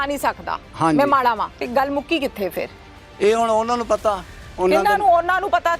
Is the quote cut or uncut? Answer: cut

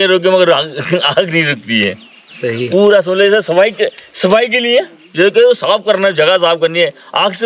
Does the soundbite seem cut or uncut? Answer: uncut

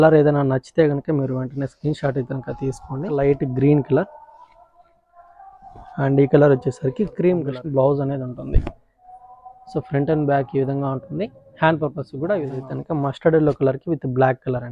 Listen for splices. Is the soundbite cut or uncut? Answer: cut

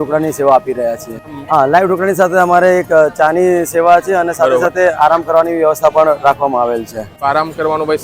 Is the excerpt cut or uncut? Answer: cut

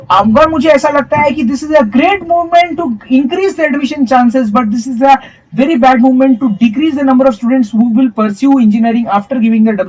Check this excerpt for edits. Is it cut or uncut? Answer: uncut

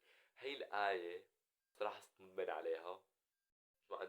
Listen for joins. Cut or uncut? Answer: cut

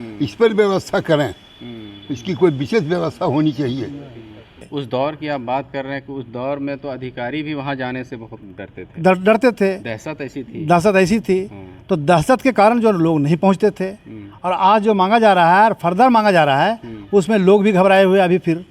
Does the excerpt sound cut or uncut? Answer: cut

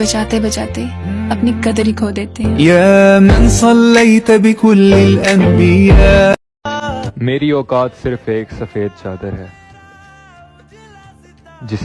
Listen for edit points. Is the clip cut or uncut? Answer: cut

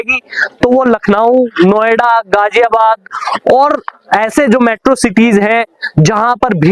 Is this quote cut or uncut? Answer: uncut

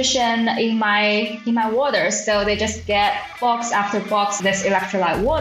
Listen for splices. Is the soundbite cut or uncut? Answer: cut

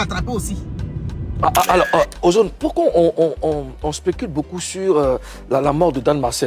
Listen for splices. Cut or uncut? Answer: cut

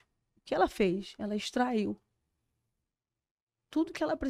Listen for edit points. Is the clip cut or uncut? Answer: uncut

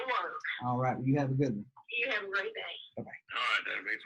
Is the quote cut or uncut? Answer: cut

